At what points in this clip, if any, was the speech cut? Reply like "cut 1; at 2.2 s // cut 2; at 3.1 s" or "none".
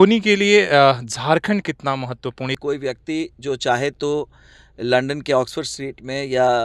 cut 1; at 2.6 s